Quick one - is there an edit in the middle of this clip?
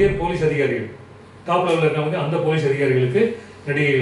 no; 0 cuts

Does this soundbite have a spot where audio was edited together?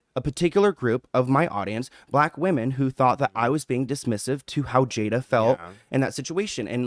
no; 0 cuts

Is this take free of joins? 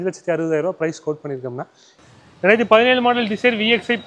no; 1 cut; at 1.9 s

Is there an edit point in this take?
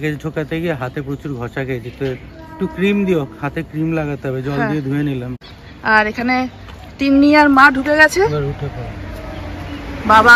no; 0 cuts

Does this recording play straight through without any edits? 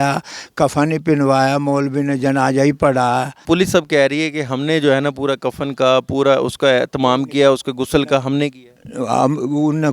no; 1 cut; at 3.4 s

